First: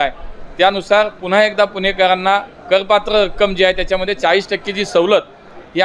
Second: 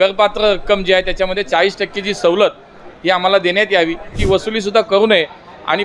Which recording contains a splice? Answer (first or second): second